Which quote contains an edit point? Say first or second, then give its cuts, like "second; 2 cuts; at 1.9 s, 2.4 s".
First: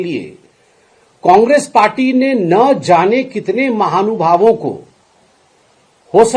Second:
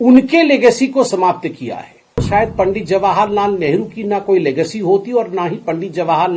second; 1 cut; at 2.2 s